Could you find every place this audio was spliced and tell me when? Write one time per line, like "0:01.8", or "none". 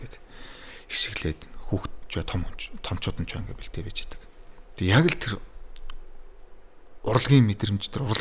none